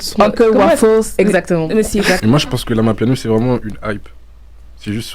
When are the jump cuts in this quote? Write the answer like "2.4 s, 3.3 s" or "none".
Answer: 2.2 s